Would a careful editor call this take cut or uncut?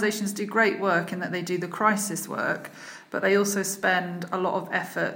uncut